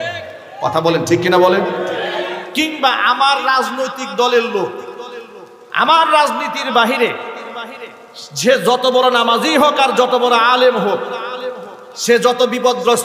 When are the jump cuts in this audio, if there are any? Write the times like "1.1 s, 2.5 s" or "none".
none